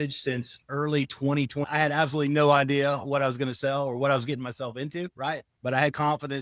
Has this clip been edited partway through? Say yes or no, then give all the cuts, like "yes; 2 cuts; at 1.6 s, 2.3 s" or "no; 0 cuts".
yes; 2 cuts; at 1.6 s, 5.5 s